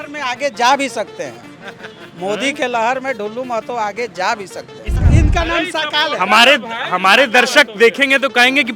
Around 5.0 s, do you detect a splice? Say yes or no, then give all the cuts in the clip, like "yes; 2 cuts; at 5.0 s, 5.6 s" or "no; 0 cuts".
yes; 1 cut; at 5.0 s